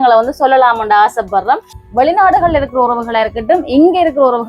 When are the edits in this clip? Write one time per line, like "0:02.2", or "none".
0:01.7